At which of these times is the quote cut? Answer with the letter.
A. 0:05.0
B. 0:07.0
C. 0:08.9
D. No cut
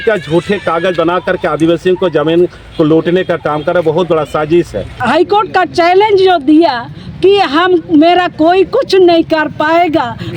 A